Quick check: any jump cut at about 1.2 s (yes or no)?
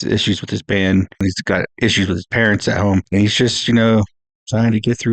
yes